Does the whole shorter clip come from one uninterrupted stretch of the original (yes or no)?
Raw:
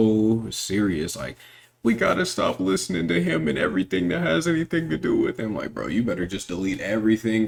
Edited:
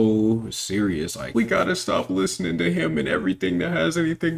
no